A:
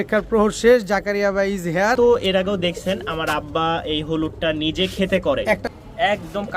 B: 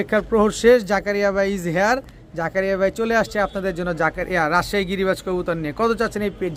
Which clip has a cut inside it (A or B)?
A